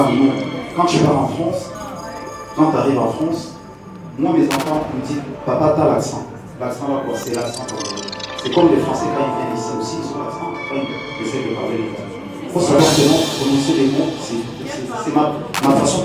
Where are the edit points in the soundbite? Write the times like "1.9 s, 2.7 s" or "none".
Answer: none